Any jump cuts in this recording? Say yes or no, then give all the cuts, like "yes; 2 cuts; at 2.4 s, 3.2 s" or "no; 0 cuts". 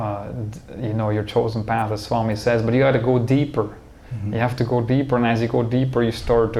no; 0 cuts